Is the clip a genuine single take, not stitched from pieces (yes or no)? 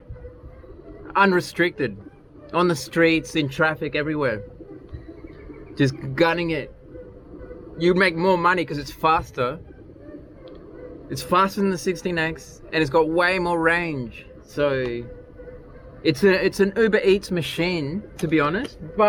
yes